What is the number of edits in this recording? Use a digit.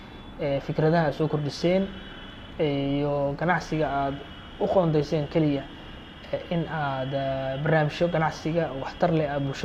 0